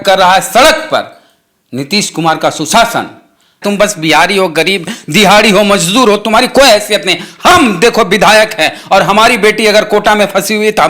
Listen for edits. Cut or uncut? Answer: cut